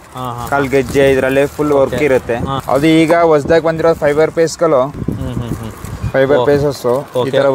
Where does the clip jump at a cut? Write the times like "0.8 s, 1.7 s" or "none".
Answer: 2.5 s, 5.0 s